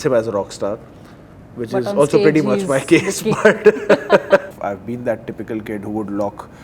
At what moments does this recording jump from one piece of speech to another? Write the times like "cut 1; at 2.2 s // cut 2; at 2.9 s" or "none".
cut 1; at 4.6 s